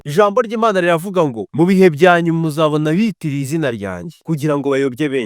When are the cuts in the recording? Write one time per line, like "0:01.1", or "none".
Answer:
0:01.4
0:04.1